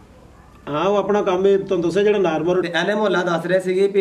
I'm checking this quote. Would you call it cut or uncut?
cut